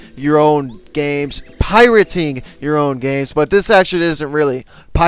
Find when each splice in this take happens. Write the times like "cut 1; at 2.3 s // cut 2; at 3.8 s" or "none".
none